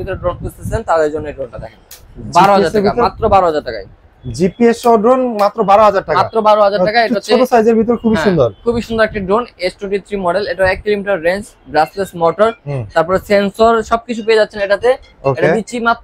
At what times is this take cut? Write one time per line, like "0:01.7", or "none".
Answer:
none